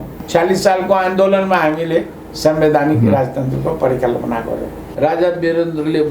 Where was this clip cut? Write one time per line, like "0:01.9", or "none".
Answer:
0:04.9

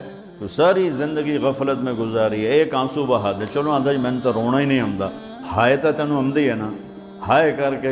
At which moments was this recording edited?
none

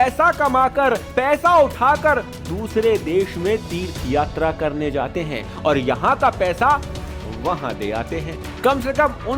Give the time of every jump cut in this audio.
none

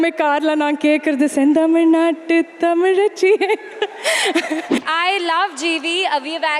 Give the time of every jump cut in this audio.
0:04.7

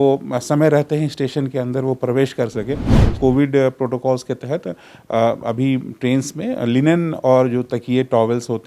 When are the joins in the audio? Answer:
0:03.0

